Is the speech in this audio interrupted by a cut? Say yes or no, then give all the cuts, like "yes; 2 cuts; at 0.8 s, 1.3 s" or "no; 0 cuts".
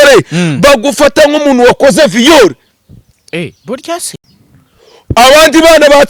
no; 0 cuts